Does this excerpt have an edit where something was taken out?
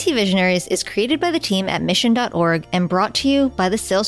no; 0 cuts

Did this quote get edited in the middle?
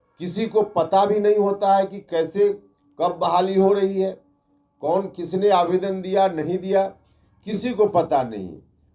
no; 0 cuts

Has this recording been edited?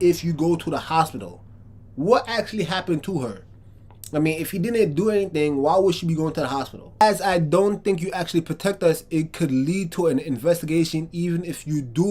yes; 1 cut; at 7.0 s

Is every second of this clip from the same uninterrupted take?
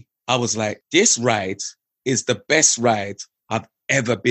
yes; 0 cuts

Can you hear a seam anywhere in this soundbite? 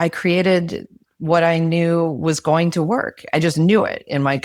no; 0 cuts

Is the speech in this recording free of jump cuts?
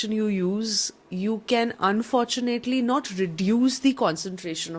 yes; 0 cuts

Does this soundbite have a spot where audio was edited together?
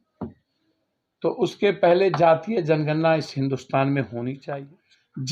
yes; 1 cut; at 4.4 s

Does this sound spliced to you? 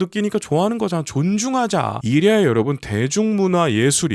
yes; 1 cut; at 2.0 s

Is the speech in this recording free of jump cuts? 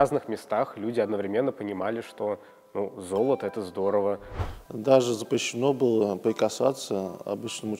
no; 1 cut; at 4.4 s

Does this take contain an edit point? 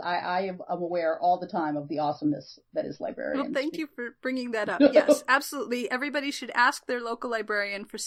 no; 0 cuts

